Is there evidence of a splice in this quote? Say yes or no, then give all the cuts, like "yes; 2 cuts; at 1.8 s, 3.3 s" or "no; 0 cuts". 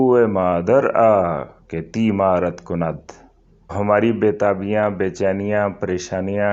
yes; 1 cut; at 3.7 s